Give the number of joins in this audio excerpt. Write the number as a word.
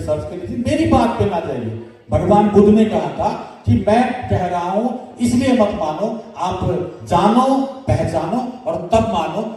zero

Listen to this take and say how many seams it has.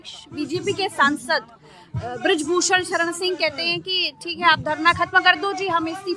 zero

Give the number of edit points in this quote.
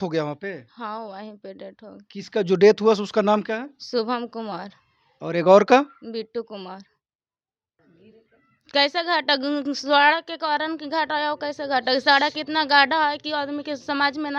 one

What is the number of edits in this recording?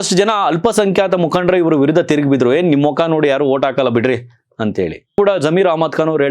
one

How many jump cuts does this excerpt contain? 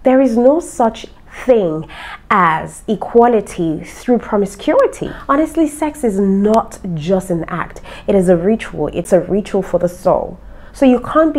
two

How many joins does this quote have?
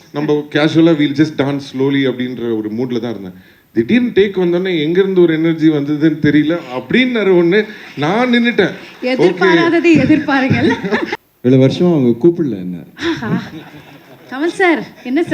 one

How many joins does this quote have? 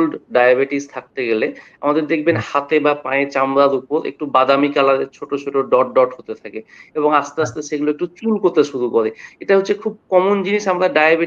zero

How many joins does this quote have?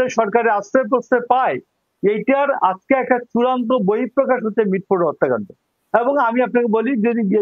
zero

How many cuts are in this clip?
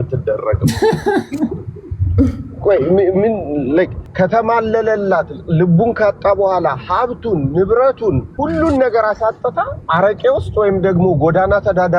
three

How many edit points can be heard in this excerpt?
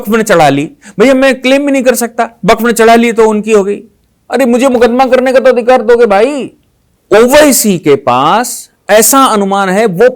one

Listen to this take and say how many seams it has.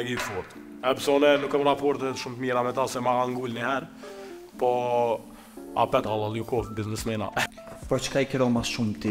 one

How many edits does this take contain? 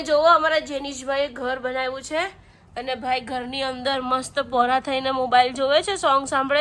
zero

